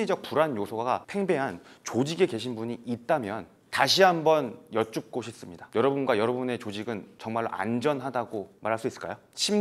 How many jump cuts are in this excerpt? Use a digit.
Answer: 1